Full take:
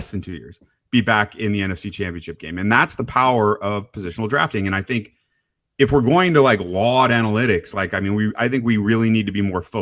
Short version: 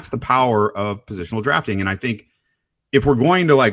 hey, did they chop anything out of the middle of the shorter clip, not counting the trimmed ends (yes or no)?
no